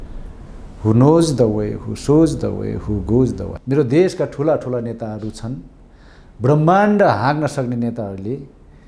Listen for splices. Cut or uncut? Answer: cut